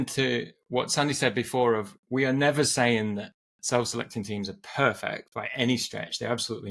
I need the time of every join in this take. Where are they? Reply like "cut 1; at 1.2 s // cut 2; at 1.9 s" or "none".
none